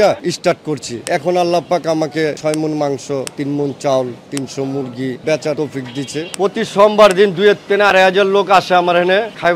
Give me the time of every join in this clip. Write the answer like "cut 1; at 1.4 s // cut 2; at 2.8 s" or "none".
cut 1; at 5.2 s // cut 2; at 6.3 s